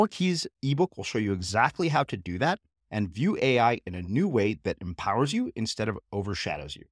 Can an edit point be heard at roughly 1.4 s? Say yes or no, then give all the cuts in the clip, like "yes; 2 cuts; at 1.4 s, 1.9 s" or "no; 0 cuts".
no; 0 cuts